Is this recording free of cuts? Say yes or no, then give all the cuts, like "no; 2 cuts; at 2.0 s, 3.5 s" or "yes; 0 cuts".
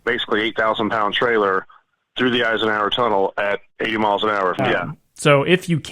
no; 1 cut; at 4.6 s